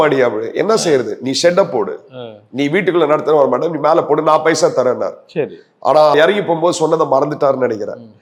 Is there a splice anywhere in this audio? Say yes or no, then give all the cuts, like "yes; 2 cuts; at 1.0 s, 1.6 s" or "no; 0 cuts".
no; 0 cuts